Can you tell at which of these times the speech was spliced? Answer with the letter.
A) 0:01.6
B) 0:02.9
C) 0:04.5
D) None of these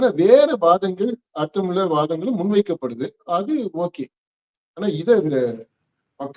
D